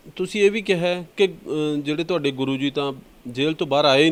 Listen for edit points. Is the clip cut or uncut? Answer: uncut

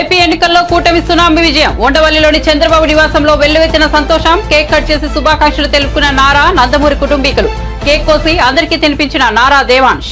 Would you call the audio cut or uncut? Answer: uncut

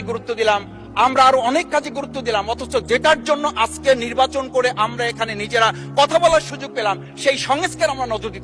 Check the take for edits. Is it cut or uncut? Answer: uncut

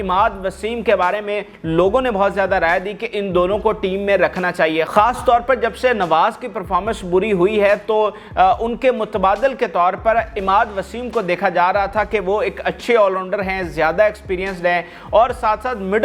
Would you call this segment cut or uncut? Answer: uncut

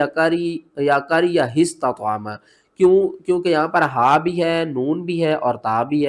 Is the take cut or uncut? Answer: uncut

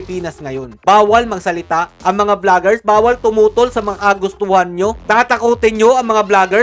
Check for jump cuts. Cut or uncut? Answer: uncut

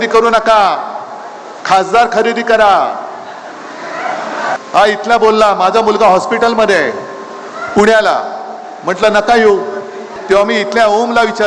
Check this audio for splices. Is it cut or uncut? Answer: cut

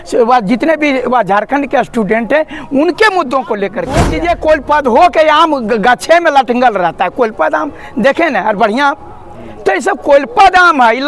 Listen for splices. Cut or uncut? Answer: cut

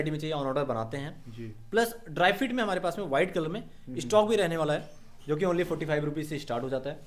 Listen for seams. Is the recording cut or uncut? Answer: uncut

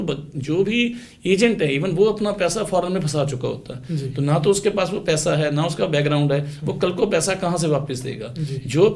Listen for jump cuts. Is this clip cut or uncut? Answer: uncut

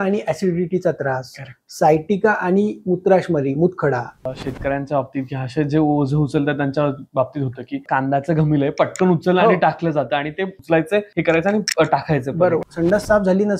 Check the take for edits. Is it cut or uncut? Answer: cut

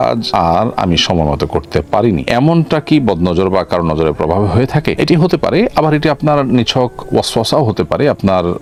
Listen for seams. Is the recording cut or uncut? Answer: uncut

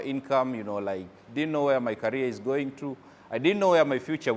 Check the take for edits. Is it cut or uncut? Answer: uncut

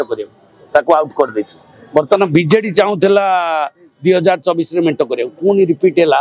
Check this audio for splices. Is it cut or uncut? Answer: uncut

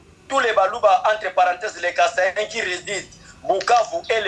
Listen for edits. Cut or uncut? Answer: uncut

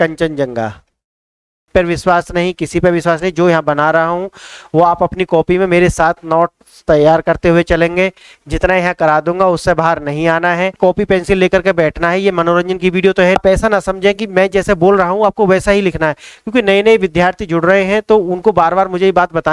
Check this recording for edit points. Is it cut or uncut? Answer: cut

